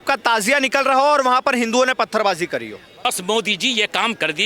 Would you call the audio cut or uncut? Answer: cut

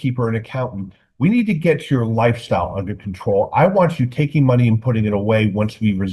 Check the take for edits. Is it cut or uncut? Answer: uncut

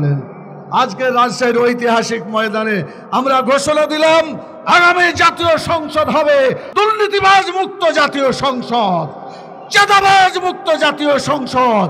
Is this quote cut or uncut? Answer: cut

